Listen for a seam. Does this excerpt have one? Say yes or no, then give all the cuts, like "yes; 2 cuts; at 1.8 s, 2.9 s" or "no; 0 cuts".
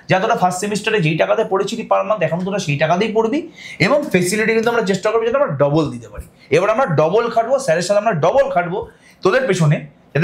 no; 0 cuts